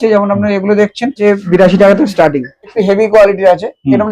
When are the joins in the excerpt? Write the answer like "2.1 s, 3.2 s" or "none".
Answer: 1.2 s, 2.7 s